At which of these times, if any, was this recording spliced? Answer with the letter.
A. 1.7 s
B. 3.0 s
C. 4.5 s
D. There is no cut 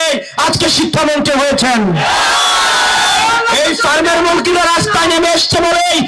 D